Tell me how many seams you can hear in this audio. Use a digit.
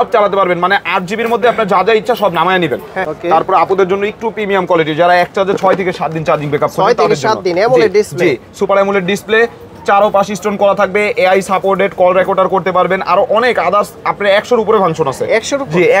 1